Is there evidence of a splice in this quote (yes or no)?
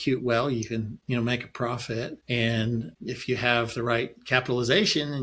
yes